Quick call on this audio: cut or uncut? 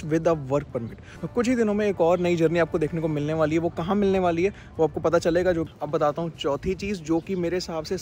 cut